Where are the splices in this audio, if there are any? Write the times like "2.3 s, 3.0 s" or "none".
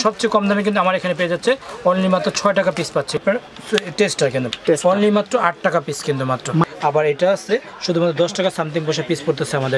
3.2 s, 6.8 s

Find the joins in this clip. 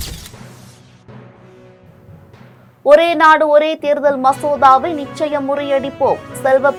none

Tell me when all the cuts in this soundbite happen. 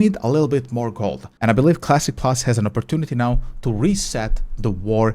1.3 s

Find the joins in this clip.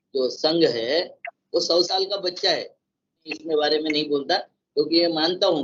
3.3 s

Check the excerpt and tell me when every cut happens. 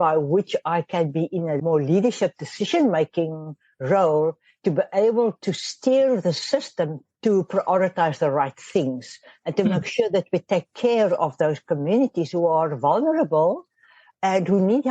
none

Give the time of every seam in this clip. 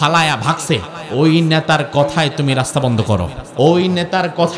1.0 s, 3.4 s

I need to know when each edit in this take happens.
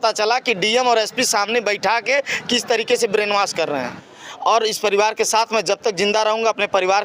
4.0 s

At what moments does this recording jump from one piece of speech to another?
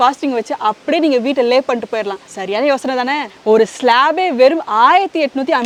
none

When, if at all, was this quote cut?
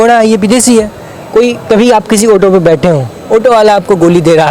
none

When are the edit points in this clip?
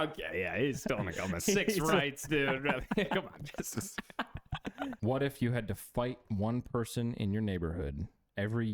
5.0 s

